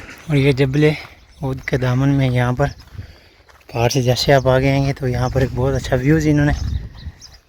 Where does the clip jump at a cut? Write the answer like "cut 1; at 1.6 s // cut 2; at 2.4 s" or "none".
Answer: none